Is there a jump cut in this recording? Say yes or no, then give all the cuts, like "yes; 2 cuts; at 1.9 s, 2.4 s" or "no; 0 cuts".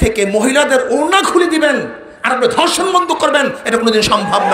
no; 0 cuts